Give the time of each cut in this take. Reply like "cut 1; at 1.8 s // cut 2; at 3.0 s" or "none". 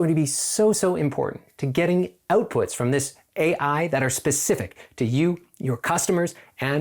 none